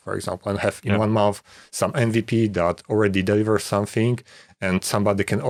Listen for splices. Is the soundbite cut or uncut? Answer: uncut